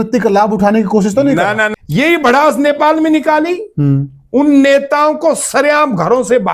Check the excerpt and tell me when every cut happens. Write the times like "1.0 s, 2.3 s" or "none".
1.7 s